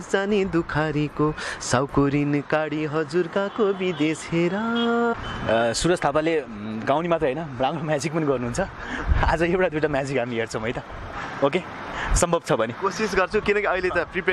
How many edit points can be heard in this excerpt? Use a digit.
1